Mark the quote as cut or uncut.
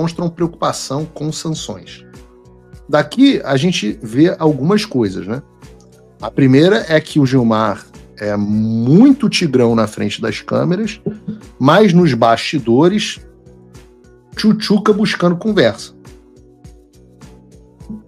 uncut